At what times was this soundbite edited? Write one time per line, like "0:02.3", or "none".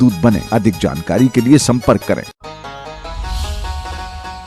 0:02.3